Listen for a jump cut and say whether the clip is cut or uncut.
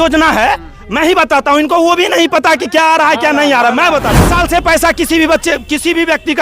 cut